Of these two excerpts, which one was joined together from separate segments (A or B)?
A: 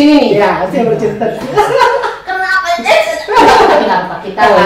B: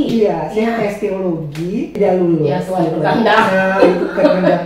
B